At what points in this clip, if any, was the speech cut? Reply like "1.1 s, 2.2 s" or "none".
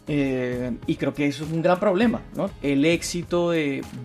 2.5 s